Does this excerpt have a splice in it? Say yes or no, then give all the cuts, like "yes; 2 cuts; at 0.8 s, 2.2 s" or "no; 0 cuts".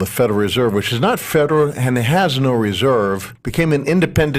no; 0 cuts